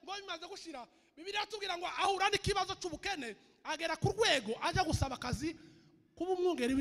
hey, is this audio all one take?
yes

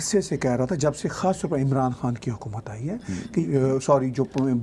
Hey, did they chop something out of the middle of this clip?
yes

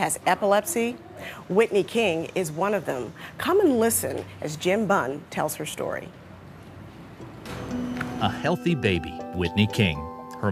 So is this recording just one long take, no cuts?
yes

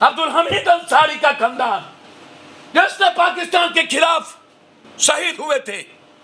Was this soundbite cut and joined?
no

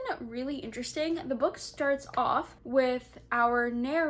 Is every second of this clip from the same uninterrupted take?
no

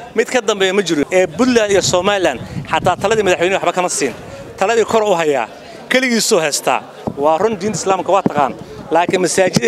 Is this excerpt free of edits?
no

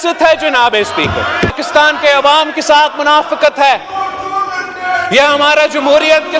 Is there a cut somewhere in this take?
yes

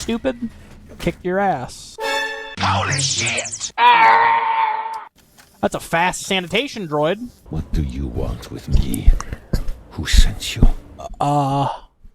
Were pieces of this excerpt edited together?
yes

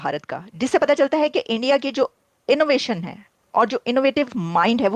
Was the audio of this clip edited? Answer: no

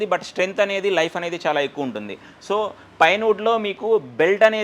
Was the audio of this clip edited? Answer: no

